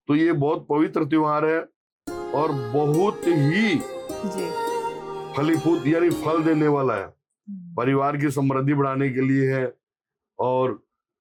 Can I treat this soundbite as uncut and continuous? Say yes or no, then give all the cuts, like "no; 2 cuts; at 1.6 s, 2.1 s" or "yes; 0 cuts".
yes; 0 cuts